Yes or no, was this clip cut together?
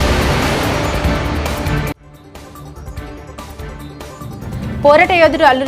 no